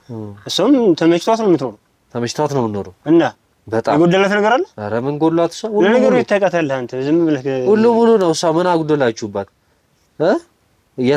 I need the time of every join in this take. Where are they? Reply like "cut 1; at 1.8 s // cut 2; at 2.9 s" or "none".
none